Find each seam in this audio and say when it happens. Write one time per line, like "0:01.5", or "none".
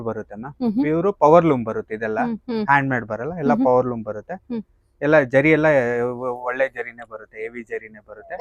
none